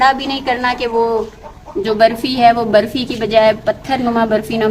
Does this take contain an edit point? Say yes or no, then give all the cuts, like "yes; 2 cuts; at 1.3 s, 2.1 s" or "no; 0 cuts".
no; 0 cuts